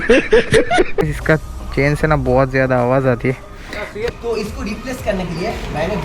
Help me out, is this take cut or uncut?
cut